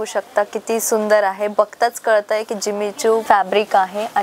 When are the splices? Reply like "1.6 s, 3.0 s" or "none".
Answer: 3.2 s